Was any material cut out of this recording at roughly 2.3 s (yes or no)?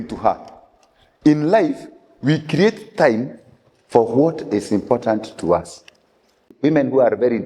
no